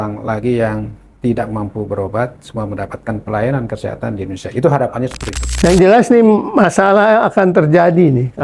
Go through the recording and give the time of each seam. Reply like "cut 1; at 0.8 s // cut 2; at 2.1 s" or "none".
cut 1; at 5.4 s